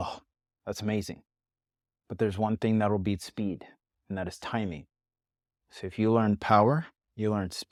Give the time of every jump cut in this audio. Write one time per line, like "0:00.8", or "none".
none